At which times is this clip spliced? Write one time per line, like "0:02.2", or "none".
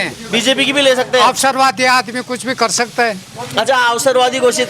none